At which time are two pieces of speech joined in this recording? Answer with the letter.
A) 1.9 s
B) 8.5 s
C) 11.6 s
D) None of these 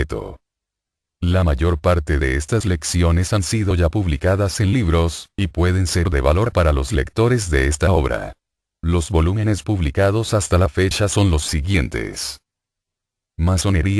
D